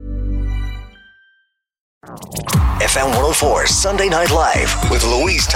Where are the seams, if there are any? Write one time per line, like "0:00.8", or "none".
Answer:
0:02.0